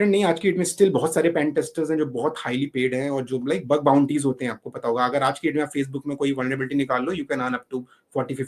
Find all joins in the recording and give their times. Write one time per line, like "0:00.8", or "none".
none